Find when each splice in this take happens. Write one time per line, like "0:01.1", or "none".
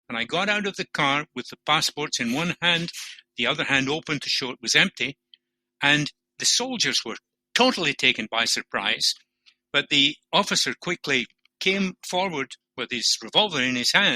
0:06.3
0:11.5
0:12.6